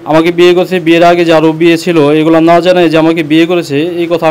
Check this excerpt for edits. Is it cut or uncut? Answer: uncut